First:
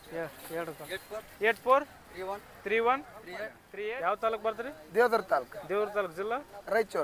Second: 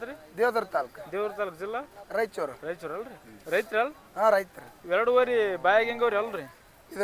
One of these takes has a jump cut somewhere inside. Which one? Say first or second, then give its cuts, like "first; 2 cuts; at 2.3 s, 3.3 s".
first; 1 cut; at 3.6 s